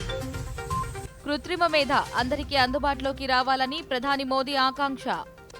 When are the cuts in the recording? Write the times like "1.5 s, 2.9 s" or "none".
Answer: none